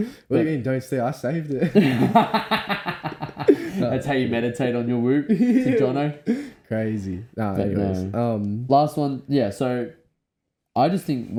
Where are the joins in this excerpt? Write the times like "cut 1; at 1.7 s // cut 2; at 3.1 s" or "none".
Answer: none

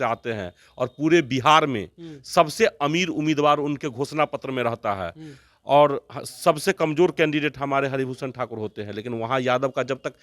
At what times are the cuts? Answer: none

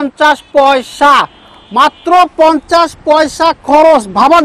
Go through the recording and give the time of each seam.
none

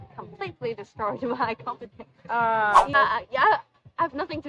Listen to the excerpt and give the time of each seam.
cut 1; at 2.9 s

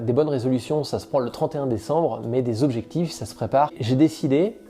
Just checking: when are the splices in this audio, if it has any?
cut 1; at 3.8 s

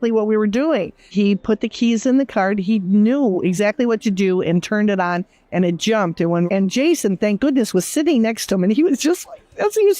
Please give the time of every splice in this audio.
cut 1; at 1.0 s // cut 2; at 6.5 s

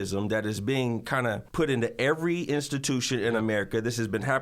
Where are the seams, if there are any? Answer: cut 1; at 1.5 s

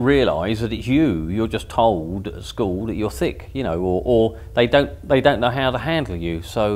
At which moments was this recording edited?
none

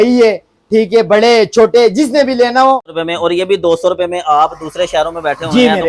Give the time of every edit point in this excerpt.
cut 1; at 2.9 s

